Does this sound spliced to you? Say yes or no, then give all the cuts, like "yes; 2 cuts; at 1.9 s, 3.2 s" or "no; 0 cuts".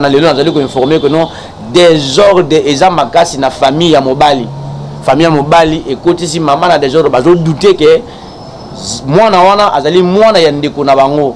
no; 0 cuts